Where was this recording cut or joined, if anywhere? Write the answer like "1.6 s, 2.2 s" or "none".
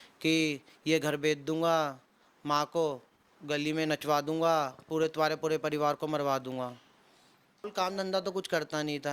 7.7 s